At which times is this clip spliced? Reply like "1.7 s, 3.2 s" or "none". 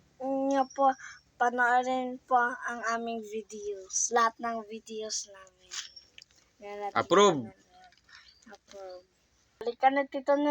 9.6 s